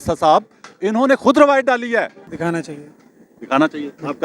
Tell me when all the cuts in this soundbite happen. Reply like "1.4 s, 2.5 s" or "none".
2.2 s